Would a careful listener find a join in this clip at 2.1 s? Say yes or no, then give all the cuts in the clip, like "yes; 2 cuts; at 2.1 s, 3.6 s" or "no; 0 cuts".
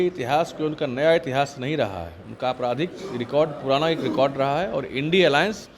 no; 0 cuts